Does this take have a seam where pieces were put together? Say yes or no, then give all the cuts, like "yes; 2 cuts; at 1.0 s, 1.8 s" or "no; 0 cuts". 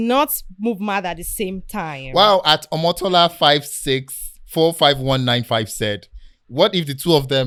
no; 0 cuts